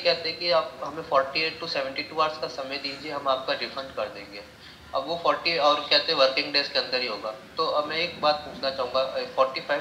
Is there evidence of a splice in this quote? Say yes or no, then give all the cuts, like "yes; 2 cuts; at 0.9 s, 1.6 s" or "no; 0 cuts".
no; 0 cuts